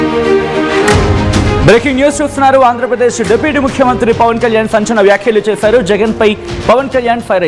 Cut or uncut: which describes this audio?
cut